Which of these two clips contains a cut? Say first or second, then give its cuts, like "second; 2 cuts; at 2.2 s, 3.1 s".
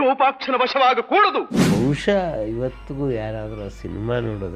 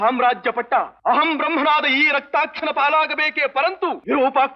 first; 1 cut; at 1.6 s